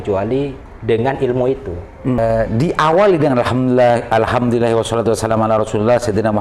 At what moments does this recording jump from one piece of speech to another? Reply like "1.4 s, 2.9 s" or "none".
2.2 s